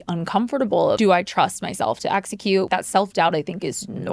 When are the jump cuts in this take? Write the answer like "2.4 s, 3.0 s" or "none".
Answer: 1.0 s, 2.7 s